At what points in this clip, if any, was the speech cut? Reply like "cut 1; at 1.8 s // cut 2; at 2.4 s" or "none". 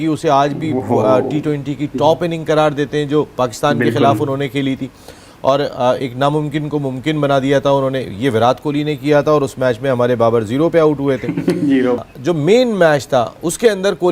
cut 1; at 12.0 s